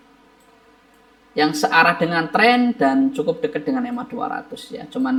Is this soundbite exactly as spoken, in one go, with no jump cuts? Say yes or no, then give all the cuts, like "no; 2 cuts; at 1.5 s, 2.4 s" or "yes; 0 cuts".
yes; 0 cuts